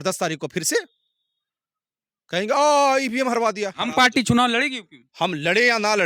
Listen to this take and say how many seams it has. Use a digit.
1